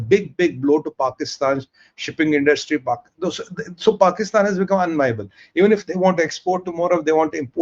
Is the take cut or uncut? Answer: uncut